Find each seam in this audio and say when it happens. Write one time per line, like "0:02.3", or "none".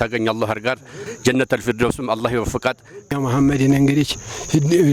0:01.0
0:03.1